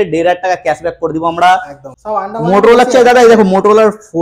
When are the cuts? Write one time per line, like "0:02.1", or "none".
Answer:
0:01.8